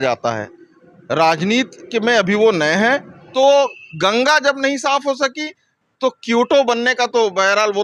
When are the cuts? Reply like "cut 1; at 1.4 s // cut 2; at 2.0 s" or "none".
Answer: cut 1; at 3.2 s